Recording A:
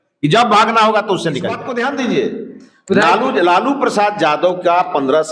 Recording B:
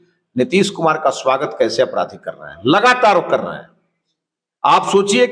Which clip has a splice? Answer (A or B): A